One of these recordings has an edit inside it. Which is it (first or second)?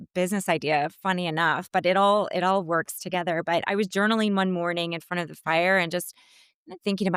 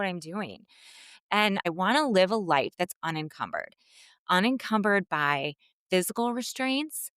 second